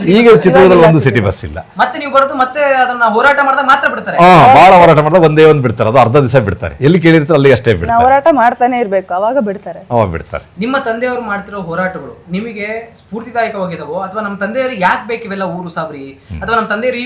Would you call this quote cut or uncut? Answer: uncut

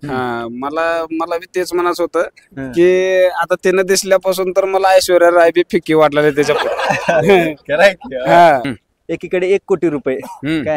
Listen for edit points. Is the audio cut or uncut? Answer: cut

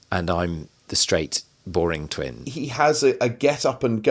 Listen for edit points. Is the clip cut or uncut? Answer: cut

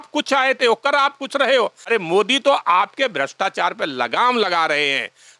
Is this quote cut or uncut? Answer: cut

